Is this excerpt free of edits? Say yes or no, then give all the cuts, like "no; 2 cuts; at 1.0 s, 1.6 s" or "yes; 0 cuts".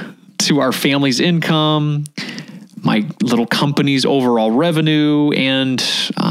yes; 0 cuts